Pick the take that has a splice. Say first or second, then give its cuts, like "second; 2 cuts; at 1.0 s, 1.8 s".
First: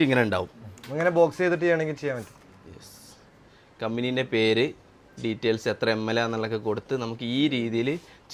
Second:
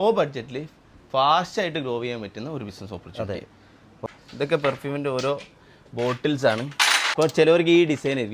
second; 2 cuts; at 4.0 s, 7.0 s